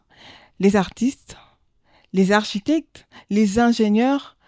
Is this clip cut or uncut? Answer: uncut